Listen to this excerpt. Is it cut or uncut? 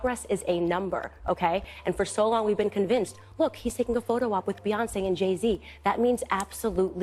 uncut